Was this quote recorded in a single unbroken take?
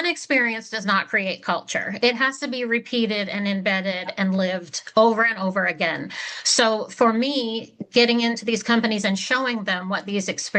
yes; 0 cuts

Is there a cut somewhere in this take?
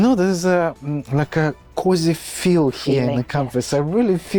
no; 0 cuts

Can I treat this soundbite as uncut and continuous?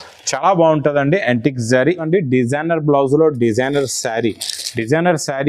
no; 1 cut; at 2.0 s

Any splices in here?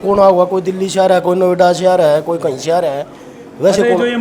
no; 0 cuts

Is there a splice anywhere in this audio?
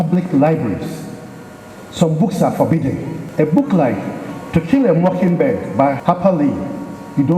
yes; 2 cuts; at 3.2 s, 6.0 s

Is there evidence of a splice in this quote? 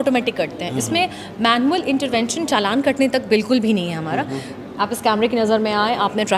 yes; 1 cut; at 4.7 s

